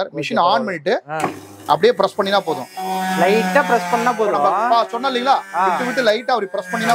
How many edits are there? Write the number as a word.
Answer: zero